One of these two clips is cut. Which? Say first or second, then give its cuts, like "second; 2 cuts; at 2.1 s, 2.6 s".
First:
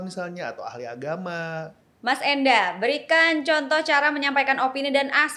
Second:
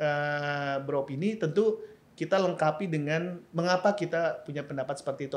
first; 1 cut; at 1.8 s